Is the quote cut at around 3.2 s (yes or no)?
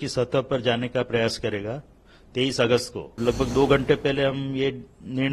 yes